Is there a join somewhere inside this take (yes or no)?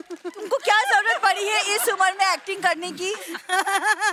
no